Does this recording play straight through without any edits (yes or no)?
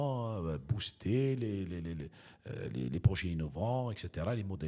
yes